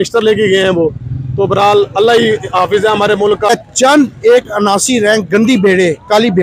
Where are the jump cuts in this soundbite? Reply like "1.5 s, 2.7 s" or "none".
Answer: 3.5 s